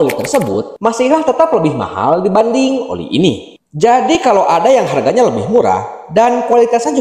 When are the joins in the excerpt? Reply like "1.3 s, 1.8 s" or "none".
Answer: 3.5 s